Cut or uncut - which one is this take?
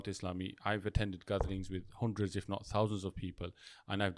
uncut